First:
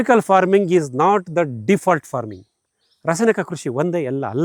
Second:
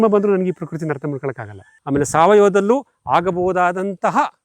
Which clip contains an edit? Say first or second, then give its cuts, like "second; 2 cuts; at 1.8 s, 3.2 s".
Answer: second; 1 cut; at 1.7 s